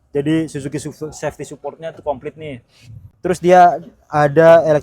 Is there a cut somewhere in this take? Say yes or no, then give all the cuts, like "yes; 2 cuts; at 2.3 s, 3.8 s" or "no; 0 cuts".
no; 0 cuts